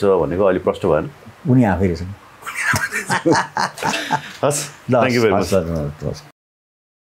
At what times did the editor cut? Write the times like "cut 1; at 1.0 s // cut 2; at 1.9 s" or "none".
none